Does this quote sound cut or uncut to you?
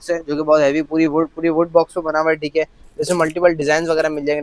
uncut